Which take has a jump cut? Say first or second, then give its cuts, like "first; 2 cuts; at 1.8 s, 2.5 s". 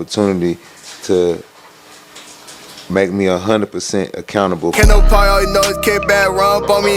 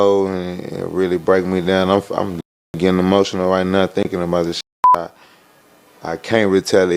first; 1 cut; at 4.7 s